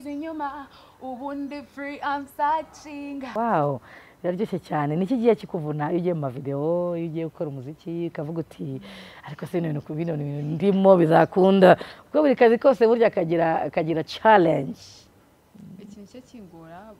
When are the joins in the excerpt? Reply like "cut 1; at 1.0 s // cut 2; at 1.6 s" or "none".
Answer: cut 1; at 3.3 s